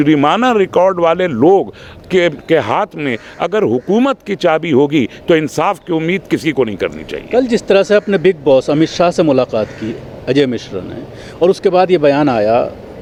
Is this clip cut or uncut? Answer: uncut